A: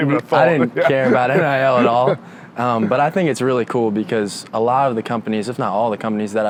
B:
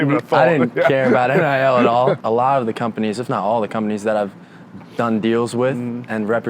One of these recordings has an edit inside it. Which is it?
B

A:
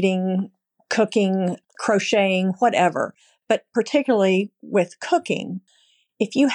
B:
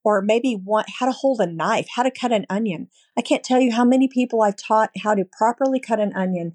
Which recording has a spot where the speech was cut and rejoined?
A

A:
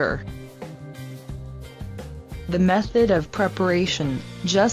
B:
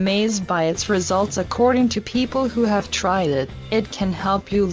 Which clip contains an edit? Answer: B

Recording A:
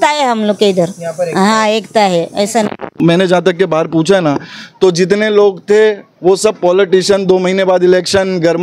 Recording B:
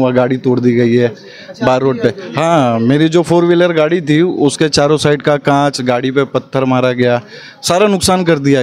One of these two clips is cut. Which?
A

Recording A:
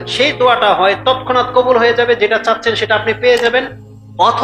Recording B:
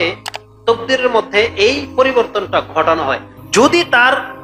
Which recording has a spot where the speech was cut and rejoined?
B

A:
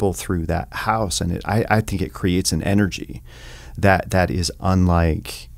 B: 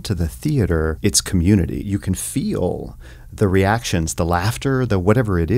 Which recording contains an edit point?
B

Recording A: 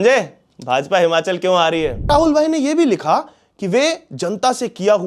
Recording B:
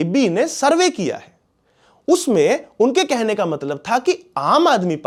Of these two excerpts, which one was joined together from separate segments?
A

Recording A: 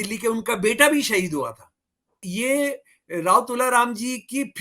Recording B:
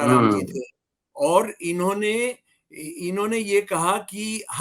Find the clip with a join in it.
A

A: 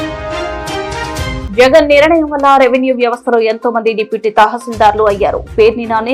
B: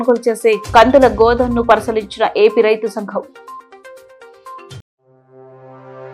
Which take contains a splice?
A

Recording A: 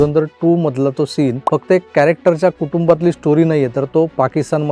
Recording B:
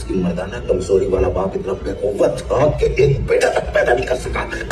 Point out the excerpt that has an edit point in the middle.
A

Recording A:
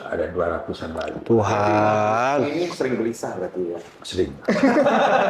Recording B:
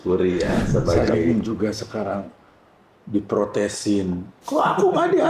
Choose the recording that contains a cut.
B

